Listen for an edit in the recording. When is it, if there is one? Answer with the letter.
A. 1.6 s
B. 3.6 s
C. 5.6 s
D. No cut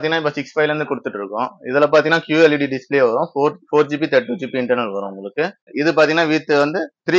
C